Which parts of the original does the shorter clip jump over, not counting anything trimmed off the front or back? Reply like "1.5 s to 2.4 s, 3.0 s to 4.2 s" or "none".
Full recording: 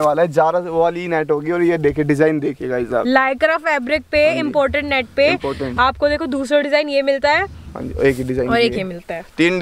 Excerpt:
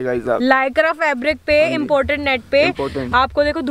none